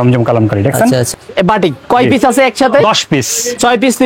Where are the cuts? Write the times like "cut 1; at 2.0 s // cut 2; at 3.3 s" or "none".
cut 1; at 1.1 s

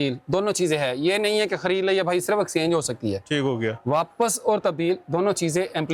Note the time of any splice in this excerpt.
none

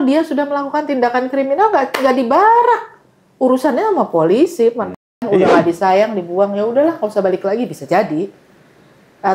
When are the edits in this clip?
cut 1; at 5.2 s

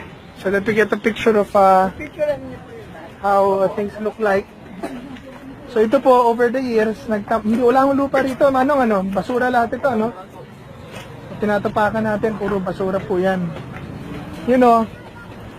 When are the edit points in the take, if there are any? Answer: none

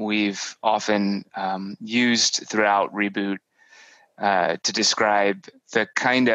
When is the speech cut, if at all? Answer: none

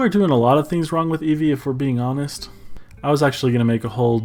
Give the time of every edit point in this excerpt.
none

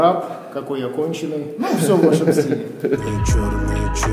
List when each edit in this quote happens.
cut 1; at 3.1 s

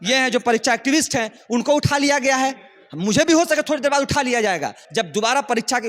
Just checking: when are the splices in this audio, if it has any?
cut 1; at 4.8 s

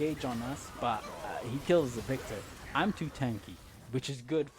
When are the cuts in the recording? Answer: none

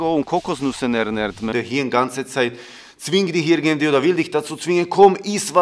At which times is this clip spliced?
cut 1; at 1.5 s

